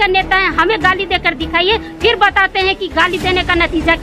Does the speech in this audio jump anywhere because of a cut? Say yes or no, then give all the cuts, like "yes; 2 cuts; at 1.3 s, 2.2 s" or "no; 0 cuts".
no; 0 cuts